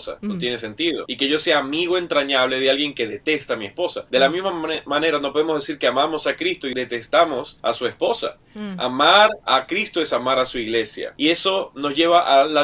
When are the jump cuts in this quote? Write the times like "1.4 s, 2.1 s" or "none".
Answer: 6.7 s